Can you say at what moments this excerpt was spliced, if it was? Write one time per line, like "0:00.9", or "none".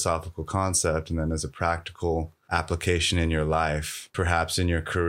0:02.4
0:04.1